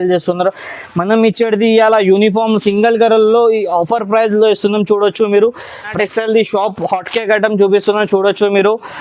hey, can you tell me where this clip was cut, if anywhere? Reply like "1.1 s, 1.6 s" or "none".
5.9 s